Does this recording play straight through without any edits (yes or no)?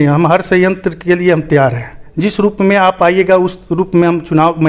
yes